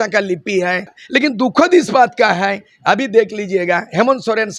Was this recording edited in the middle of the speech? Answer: yes; 1 cut; at 1.0 s

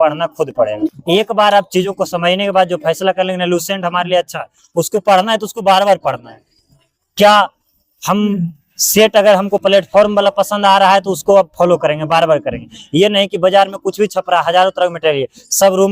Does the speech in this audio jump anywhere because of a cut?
yes; 1 cut; at 1.0 s

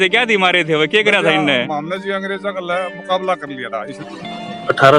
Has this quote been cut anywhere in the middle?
yes; 1 cut; at 3.9 s

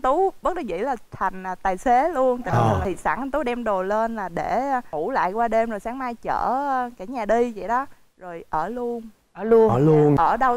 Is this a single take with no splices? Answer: yes; 0 cuts

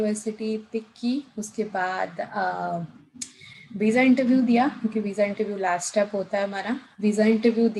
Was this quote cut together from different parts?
no; 0 cuts

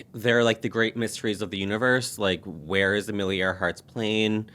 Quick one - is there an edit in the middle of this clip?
no; 0 cuts

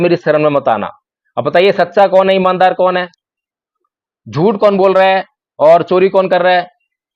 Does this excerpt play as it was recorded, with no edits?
yes; 0 cuts

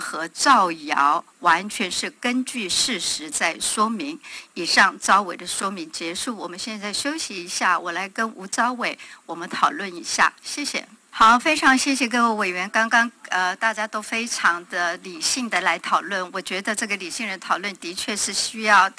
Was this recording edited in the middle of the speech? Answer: no; 0 cuts

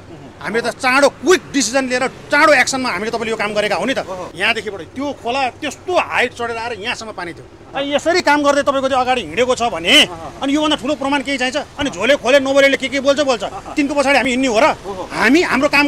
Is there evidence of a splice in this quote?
yes; 2 cuts; at 4.3 s, 7.6 s

